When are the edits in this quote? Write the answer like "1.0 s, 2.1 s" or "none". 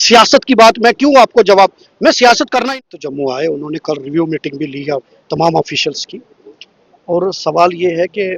2.7 s